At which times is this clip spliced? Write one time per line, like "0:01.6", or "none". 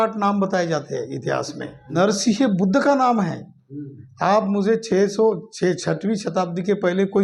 0:01.9